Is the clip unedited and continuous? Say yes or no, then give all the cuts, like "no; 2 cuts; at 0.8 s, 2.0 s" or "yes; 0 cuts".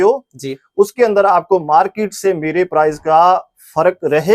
yes; 0 cuts